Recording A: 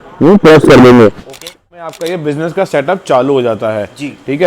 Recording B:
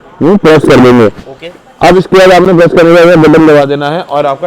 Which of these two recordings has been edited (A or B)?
A